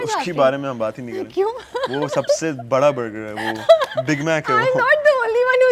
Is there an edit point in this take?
no; 0 cuts

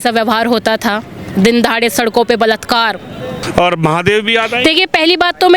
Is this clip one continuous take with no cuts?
no; 1 cut; at 3.3 s

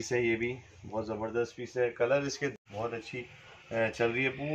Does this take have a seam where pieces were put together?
yes; 1 cut; at 2.6 s

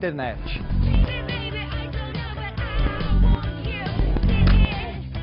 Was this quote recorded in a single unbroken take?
no; 1 cut; at 3.8 s

